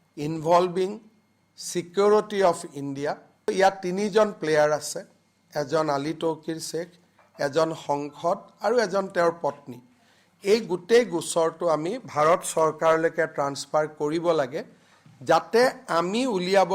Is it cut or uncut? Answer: cut